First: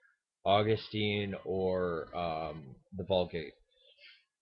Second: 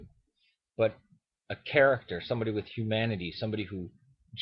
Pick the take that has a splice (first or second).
first